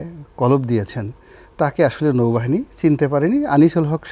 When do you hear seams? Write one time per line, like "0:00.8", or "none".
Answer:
none